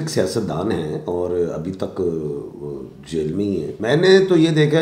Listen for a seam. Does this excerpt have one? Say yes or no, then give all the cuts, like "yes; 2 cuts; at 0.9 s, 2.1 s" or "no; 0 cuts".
yes; 1 cut; at 3.7 s